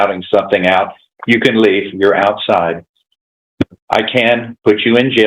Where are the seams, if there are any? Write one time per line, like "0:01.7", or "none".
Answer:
none